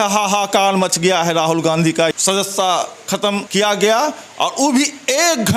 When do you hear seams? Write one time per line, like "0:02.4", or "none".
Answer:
0:02.1
0:03.5